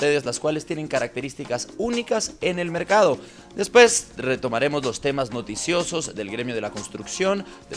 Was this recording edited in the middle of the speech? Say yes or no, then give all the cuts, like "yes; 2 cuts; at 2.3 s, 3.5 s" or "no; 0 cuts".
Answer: yes; 1 cut; at 4.7 s